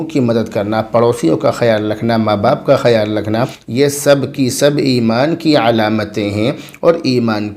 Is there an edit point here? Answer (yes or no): yes